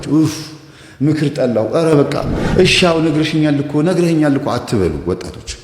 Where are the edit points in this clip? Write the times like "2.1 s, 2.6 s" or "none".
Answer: none